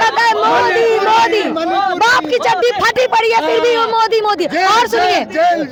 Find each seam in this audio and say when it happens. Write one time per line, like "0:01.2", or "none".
none